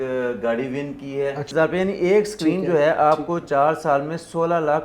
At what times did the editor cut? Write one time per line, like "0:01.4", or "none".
0:01.5